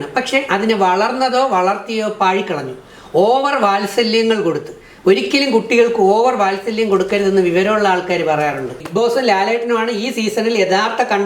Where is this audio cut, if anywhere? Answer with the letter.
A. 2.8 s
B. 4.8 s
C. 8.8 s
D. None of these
C